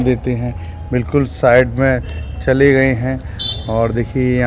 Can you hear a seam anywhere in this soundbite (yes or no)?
no